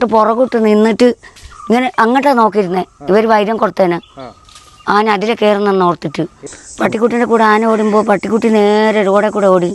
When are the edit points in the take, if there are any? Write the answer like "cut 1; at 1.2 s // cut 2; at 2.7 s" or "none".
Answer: cut 1; at 6.3 s